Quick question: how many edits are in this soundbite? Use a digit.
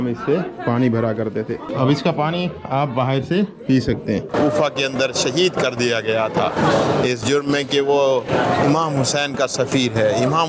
2